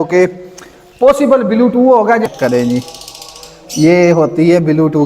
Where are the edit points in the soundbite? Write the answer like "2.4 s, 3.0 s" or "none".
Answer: 2.3 s